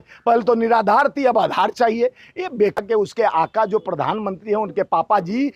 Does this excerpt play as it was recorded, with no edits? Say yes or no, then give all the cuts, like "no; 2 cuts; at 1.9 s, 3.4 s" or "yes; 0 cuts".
no; 1 cut; at 2.8 s